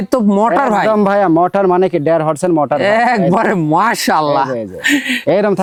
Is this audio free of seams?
yes; 0 cuts

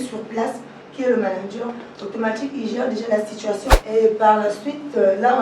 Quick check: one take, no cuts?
no; 1 cut; at 3.7 s

